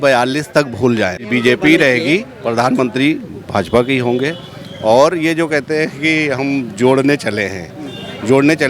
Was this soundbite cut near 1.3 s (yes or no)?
yes